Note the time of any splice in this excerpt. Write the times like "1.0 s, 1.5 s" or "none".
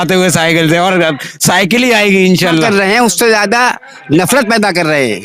2.7 s